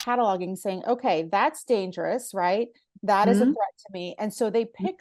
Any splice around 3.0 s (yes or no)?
no